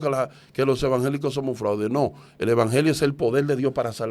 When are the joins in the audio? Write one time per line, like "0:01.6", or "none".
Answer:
none